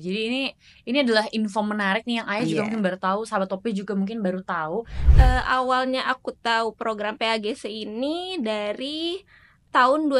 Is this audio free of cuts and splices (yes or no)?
no